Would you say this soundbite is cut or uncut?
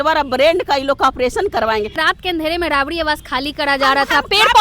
cut